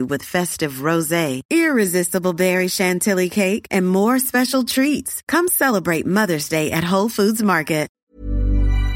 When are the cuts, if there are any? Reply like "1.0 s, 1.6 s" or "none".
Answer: 7.9 s